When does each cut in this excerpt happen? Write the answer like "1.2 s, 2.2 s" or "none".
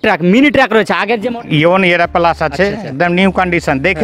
1.2 s